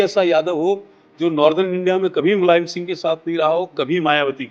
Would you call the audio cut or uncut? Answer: uncut